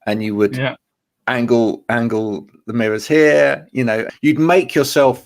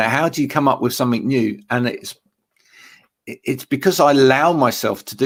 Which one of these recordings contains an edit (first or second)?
first